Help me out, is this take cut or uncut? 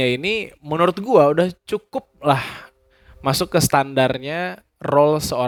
uncut